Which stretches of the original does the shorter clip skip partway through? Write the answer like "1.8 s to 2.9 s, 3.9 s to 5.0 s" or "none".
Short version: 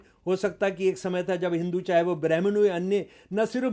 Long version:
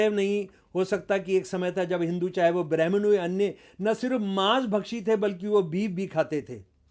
none